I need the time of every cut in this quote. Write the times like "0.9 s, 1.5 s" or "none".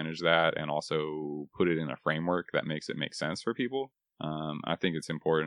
3.9 s

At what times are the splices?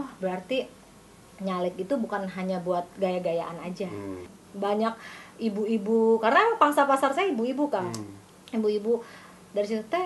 4.4 s

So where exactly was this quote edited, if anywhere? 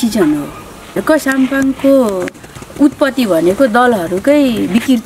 1.0 s

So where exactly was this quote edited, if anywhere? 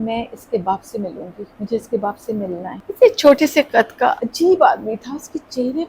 1.4 s, 2.8 s, 4.3 s

